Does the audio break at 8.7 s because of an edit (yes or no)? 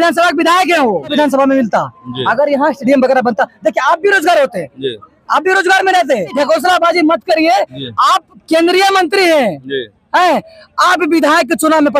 no